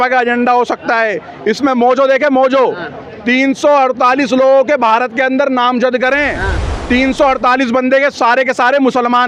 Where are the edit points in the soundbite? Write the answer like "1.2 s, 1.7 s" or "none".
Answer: none